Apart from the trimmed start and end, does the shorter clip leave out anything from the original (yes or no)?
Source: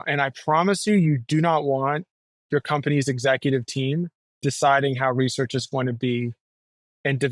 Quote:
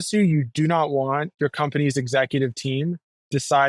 yes